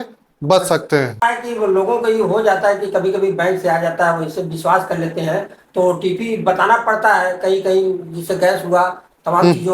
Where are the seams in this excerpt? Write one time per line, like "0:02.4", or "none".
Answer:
0:01.2